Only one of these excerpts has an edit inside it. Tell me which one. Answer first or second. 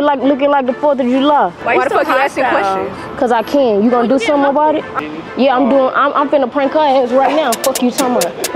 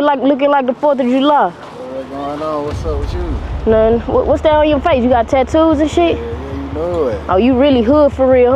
first